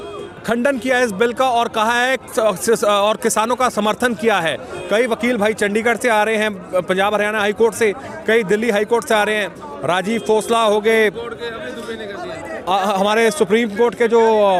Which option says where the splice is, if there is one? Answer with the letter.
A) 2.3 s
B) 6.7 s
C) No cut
C